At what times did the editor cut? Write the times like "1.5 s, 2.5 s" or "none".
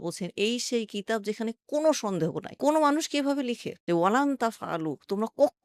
3.7 s